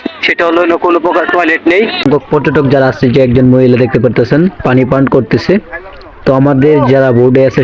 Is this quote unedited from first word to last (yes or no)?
no